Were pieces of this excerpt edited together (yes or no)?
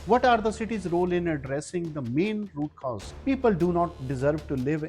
yes